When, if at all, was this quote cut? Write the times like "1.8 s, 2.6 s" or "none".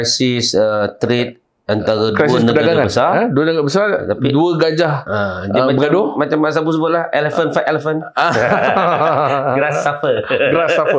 none

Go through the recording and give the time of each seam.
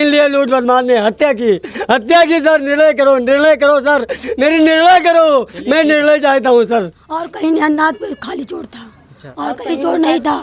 7.3 s

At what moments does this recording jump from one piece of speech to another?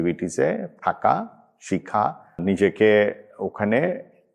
2.4 s

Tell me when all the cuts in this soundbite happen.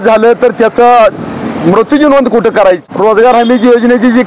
2.8 s

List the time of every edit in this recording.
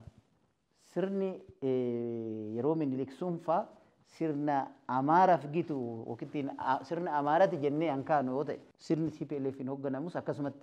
8.7 s

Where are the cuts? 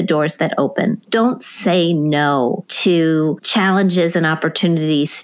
1.0 s, 2.7 s, 3.4 s

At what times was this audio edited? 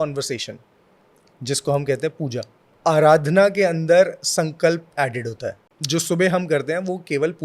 2.7 s, 5.7 s

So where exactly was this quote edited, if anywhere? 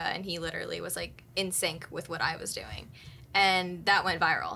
none

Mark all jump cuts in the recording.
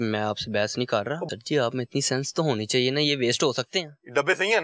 1.2 s

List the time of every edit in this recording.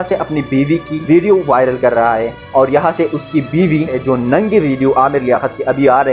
1.0 s, 4.0 s

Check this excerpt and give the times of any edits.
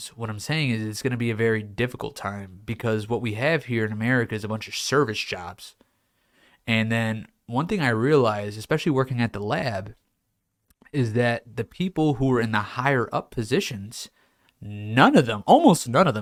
none

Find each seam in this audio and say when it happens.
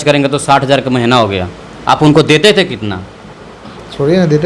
none

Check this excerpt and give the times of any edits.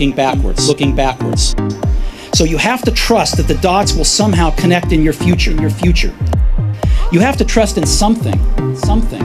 none

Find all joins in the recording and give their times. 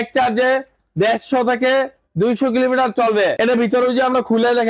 3.3 s

